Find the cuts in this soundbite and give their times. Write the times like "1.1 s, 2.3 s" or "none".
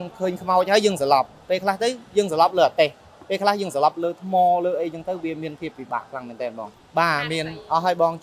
6.8 s